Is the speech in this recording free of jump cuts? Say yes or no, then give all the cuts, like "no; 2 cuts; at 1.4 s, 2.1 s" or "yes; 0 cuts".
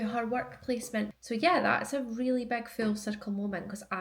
no; 1 cut; at 1.1 s